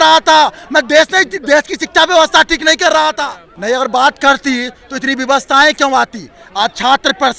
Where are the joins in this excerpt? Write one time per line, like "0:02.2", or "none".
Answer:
0:03.1